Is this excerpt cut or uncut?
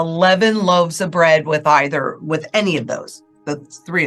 uncut